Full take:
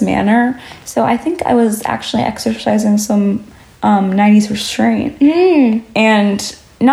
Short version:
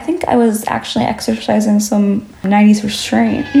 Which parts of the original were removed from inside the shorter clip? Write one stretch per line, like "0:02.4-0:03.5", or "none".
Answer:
0:03.6-0:04.1